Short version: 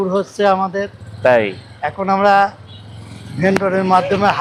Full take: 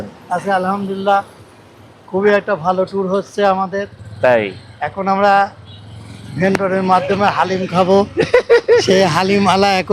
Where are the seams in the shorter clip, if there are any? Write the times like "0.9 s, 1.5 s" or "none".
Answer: none